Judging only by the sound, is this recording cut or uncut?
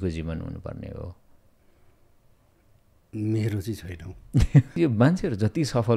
cut